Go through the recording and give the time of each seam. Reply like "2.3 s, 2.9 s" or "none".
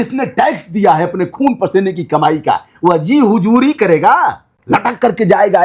4.5 s

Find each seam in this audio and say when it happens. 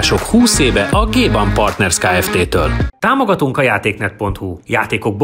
2.9 s

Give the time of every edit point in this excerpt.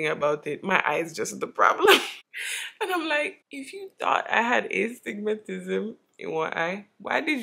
none

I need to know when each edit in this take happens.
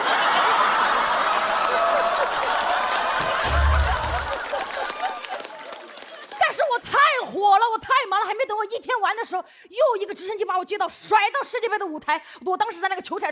none

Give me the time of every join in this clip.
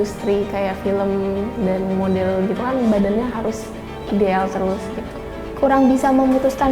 5.4 s

